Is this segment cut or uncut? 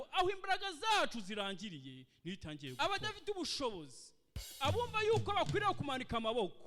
cut